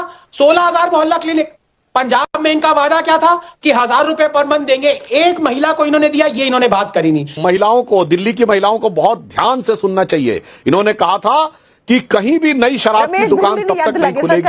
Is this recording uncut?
no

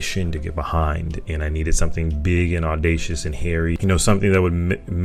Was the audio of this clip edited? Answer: yes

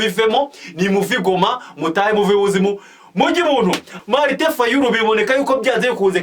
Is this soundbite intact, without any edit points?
no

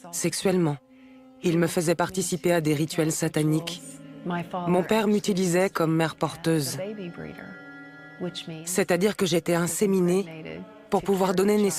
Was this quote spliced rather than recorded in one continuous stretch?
no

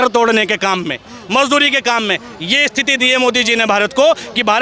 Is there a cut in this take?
no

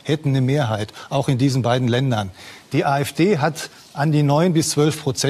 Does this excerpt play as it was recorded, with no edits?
no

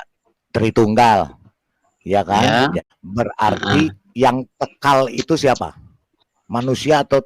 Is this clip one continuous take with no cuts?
no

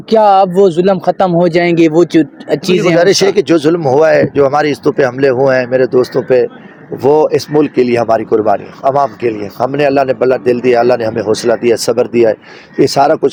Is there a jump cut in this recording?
no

